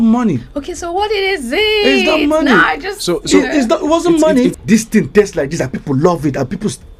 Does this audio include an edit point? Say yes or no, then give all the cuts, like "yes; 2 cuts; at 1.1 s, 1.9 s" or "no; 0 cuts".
yes; 1 cut; at 4.6 s